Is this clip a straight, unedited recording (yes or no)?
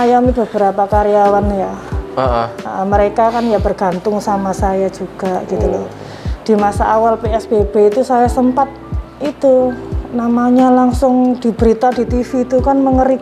yes